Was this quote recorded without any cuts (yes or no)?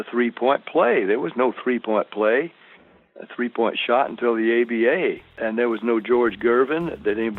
no